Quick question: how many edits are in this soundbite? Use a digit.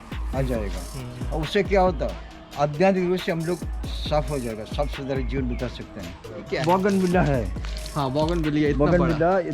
1